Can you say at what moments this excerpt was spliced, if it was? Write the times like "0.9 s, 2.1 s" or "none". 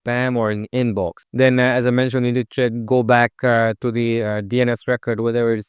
1.2 s